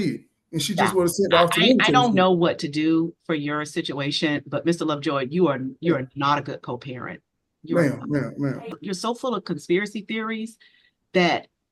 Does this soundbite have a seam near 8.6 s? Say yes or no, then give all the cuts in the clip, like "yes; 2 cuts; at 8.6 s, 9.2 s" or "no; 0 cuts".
yes; 1 cut; at 8.6 s